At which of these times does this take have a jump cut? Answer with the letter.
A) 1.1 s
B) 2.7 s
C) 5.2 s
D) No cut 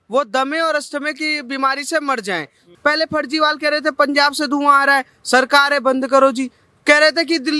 B